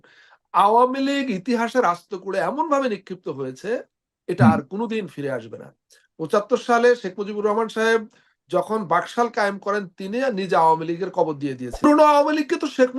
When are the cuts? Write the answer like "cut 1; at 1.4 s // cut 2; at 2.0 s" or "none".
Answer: cut 1; at 11.8 s